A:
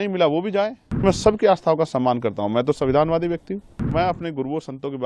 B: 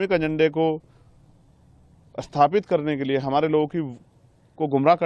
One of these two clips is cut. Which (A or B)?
A